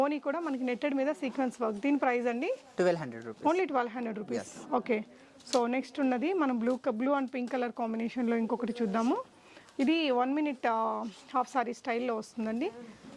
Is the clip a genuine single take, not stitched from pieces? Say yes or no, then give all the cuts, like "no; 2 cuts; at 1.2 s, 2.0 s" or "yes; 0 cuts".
yes; 0 cuts